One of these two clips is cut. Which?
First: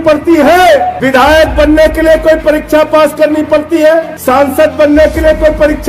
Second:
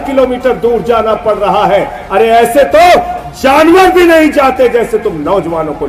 first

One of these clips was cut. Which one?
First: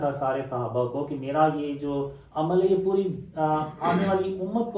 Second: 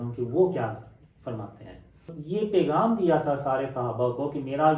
second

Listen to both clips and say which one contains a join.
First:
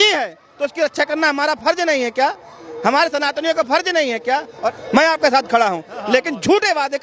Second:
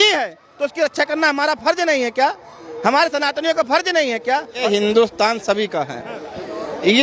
second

